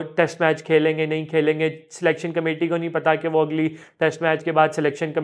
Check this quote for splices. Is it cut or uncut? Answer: uncut